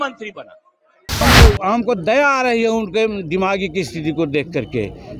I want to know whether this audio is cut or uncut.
cut